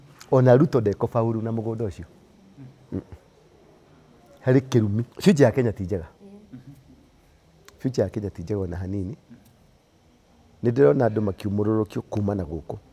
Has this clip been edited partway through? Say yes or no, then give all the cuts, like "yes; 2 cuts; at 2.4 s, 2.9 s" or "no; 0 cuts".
yes; 1 cut; at 5.1 s